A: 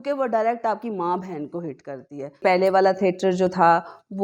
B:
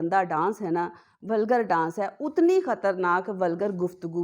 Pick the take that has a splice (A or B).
A